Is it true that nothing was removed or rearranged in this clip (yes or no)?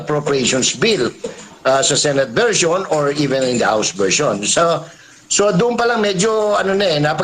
yes